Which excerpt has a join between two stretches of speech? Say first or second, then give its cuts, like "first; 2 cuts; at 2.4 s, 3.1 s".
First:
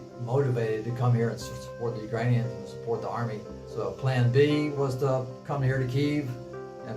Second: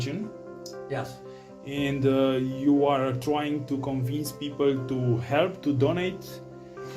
first; 1 cut; at 3.6 s